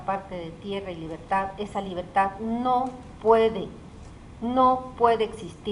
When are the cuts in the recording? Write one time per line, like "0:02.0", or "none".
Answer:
0:01.5